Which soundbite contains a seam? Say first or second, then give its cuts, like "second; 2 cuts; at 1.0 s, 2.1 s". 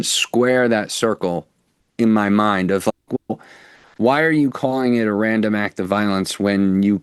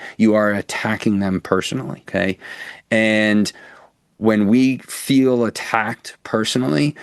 second; 1 cut; at 2.1 s